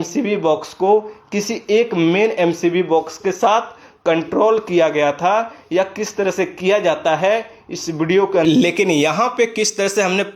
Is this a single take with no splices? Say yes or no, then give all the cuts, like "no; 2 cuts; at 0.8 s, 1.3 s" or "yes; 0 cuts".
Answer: no; 1 cut; at 8.4 s